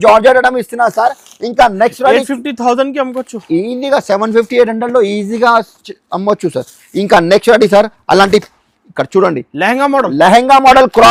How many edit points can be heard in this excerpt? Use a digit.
0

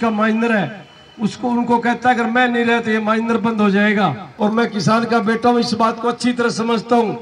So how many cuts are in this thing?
1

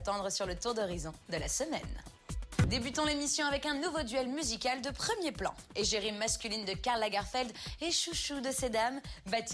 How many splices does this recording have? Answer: 0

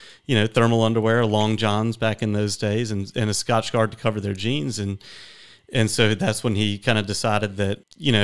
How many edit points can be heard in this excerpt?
0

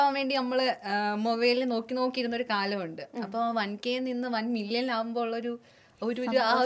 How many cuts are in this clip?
0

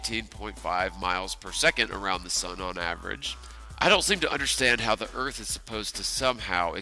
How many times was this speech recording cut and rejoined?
1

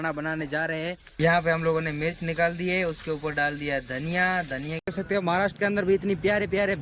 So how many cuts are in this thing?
2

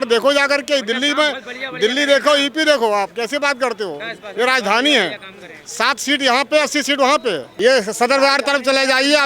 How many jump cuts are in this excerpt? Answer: 1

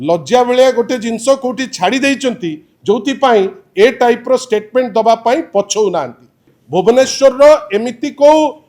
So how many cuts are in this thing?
1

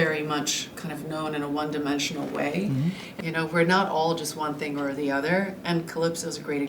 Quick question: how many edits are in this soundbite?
1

